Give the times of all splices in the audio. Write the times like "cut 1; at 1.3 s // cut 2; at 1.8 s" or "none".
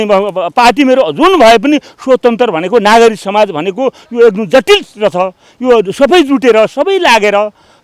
none